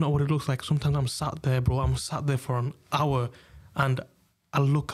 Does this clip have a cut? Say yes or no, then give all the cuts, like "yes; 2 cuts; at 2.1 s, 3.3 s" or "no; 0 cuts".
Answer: no; 0 cuts